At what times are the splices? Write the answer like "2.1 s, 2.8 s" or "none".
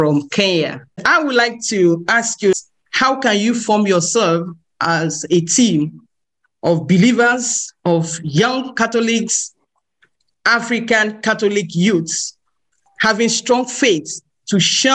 1.0 s, 2.6 s